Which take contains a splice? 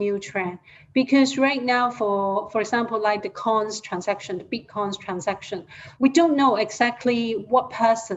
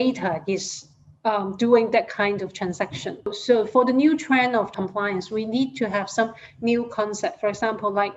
second; 2 cuts; at 3.4 s, 4.7 s

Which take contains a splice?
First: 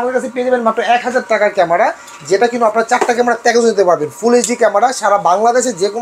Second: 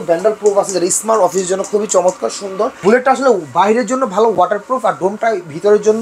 second; 1 cut; at 2.8 s

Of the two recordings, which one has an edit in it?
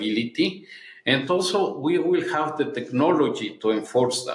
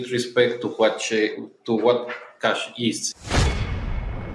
second; 1 cut; at 3.1 s

